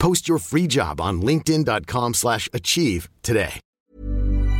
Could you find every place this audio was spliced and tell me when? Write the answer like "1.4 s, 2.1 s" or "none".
3.6 s